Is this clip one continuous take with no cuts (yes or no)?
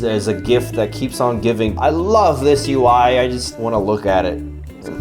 no